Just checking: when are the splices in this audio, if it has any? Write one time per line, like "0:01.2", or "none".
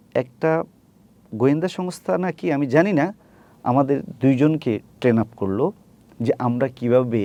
none